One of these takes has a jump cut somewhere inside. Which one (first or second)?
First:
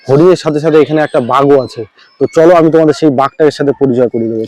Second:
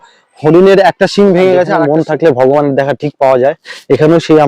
second